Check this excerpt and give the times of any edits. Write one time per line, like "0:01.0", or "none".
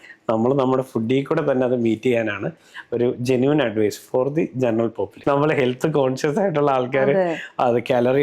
0:05.1